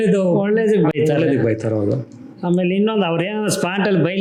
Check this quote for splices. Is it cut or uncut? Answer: uncut